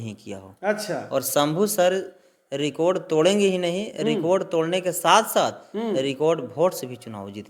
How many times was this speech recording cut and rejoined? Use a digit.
0